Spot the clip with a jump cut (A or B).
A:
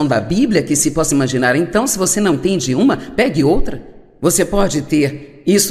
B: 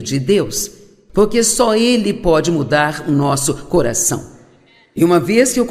A